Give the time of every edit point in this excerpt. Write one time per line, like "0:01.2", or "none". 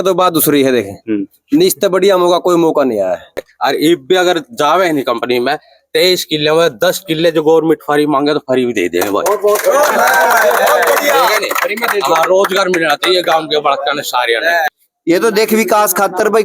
0:03.3
0:14.6